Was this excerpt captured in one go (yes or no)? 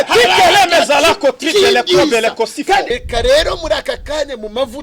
no